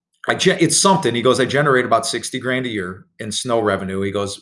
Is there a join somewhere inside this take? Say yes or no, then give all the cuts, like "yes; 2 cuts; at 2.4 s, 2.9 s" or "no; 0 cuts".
no; 0 cuts